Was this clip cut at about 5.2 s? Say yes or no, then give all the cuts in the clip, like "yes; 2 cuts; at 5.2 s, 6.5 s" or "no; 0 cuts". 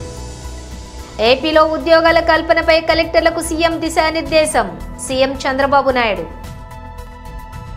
no; 2 cuts; at 0.9 s, 6.9 s